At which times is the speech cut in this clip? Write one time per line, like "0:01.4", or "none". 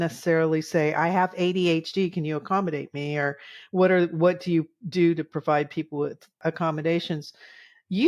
0:06.4